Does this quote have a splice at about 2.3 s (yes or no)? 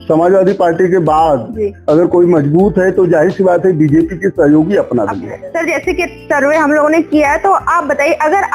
no